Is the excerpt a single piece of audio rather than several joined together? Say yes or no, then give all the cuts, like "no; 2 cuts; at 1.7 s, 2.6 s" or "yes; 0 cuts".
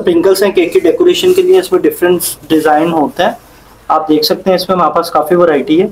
yes; 0 cuts